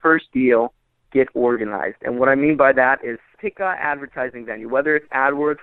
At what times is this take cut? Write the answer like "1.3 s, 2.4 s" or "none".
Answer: 3.3 s